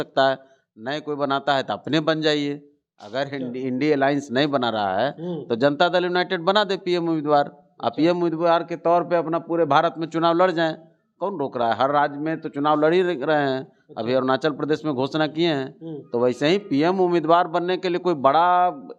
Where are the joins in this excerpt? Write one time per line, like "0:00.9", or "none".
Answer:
none